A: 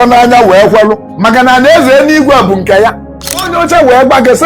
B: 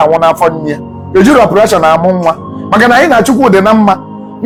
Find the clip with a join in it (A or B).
A